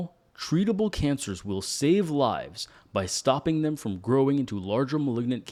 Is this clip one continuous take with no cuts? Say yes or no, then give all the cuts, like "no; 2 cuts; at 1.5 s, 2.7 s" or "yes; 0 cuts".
yes; 0 cuts